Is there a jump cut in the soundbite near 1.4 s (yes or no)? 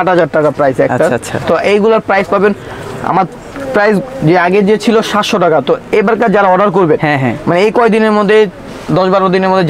no